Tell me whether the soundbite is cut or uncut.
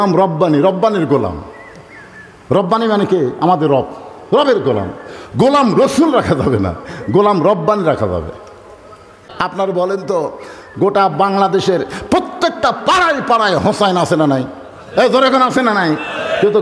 cut